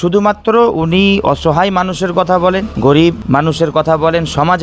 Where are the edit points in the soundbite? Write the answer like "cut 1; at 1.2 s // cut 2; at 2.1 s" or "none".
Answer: cut 1; at 2.7 s